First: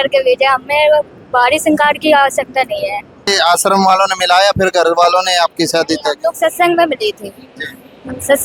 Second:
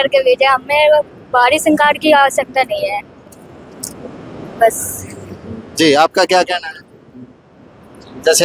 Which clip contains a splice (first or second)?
first